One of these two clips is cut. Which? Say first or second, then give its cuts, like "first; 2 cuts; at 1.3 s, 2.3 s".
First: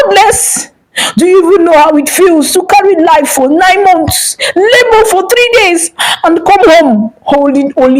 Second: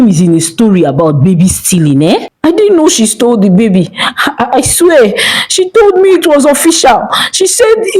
second; 1 cut; at 2.3 s